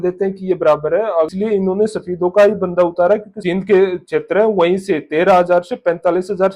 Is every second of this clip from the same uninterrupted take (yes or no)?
no